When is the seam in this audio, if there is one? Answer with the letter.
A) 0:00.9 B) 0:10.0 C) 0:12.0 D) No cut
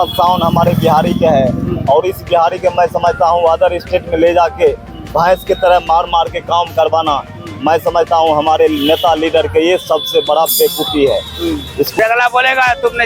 C